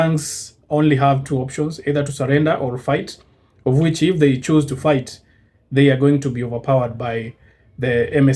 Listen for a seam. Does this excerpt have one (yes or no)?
no